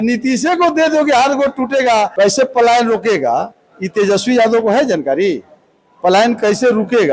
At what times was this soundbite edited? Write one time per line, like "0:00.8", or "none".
0:02.1